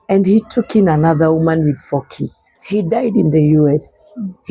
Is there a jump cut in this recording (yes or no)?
yes